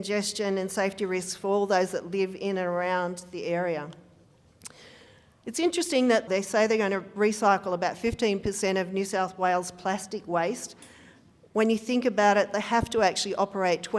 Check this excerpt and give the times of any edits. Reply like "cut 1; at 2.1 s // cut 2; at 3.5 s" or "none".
cut 1; at 6.3 s